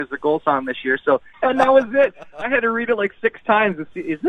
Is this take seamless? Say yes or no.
no